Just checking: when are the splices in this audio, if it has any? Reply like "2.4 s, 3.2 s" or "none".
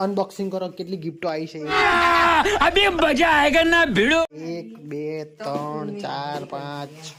none